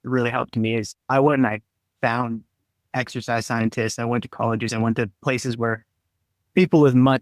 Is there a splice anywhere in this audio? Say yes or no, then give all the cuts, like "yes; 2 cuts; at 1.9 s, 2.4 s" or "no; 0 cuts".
no; 0 cuts